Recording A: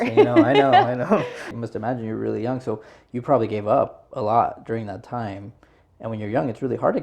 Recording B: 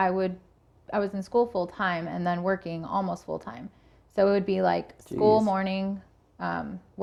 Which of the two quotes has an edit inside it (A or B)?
A